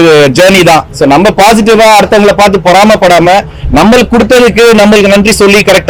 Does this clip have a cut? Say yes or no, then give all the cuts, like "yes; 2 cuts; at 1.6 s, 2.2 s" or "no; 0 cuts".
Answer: no; 0 cuts